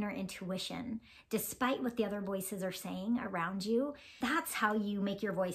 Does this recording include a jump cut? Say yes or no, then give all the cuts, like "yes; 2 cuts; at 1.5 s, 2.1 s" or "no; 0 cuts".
yes; 1 cut; at 4.2 s